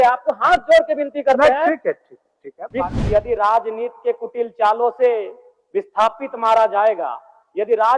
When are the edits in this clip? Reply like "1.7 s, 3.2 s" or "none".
2.9 s